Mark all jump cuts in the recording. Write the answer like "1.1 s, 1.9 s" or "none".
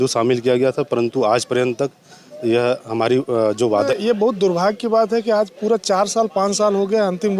3.9 s